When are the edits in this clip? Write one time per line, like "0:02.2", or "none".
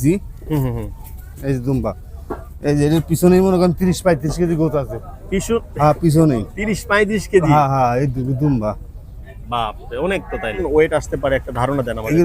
0:10.6